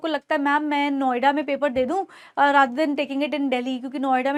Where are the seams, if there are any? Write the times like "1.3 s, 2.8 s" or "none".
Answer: none